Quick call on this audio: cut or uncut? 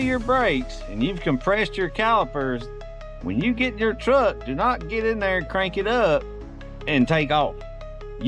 uncut